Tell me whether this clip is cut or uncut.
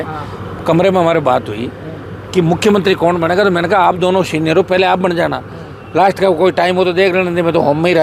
uncut